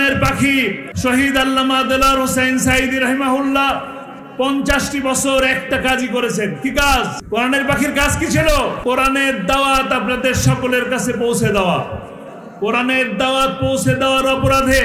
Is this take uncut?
no; 3 cuts; at 0.9 s, 7.2 s, 8.8 s

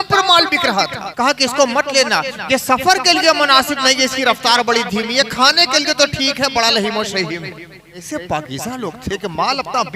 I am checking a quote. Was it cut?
yes; 2 cuts; at 1.0 s, 8.0 s

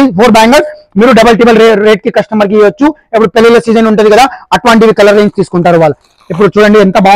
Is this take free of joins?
yes; 0 cuts

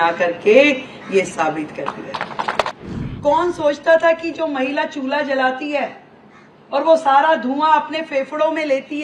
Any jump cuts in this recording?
yes; 1 cut; at 2.7 s

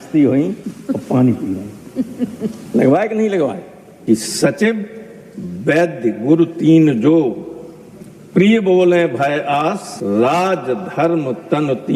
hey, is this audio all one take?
no; 1 cut; at 4.0 s

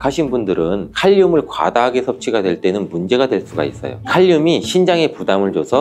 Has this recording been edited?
no; 0 cuts

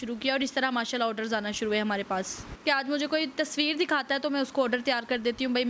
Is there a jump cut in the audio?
yes; 1 cut; at 2.5 s

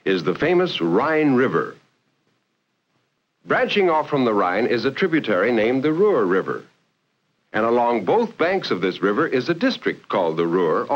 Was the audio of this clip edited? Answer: yes; 1 cut; at 5.2 s

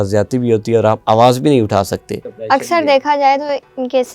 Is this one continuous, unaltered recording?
no; 1 cut; at 2.5 s

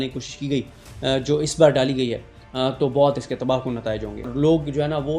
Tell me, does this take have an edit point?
yes; 1 cut; at 4.3 s

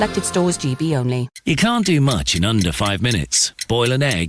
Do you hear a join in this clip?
yes; 1 cut; at 1.3 s

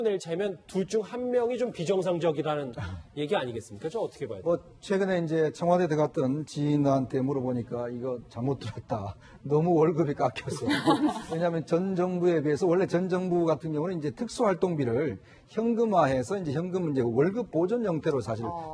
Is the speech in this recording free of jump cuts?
no; 1 cut; at 11.7 s

